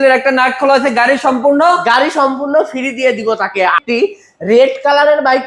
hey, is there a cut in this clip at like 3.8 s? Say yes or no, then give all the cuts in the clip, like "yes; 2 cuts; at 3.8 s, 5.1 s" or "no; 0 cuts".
yes; 1 cut; at 3.8 s